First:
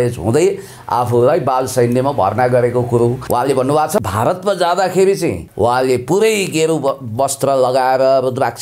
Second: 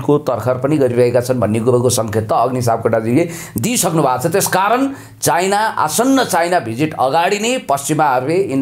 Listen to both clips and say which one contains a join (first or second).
first